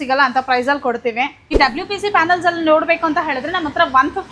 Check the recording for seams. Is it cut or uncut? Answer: cut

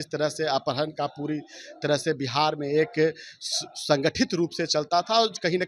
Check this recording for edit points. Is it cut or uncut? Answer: uncut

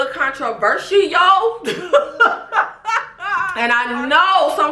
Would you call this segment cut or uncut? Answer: cut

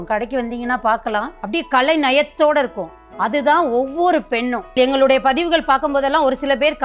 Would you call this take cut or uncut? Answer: cut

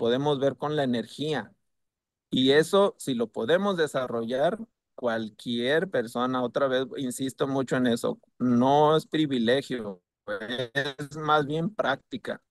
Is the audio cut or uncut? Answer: uncut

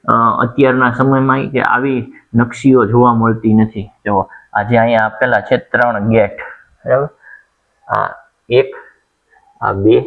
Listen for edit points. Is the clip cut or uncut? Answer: uncut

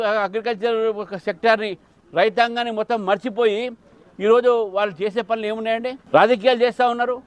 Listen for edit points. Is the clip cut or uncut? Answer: uncut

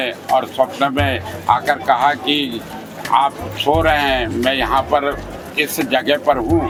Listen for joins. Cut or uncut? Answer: uncut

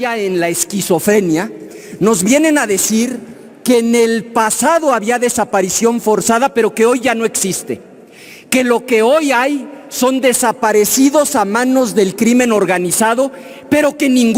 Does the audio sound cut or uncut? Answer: uncut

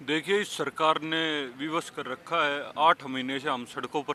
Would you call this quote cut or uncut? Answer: uncut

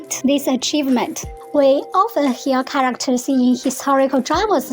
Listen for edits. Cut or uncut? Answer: cut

